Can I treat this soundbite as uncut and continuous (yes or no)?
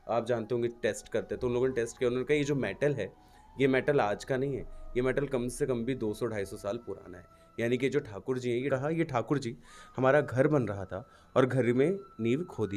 no